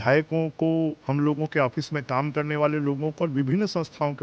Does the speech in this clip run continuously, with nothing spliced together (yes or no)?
no